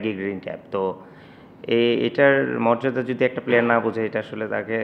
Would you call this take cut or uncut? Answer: uncut